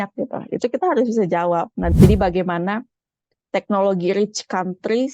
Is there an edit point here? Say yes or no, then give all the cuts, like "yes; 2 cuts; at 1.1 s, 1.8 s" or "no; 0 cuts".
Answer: yes; 1 cut; at 1.9 s